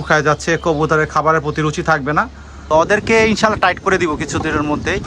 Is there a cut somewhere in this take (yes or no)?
yes